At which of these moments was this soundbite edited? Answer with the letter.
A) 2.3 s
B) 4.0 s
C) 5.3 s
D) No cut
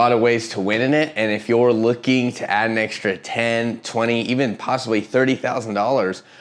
D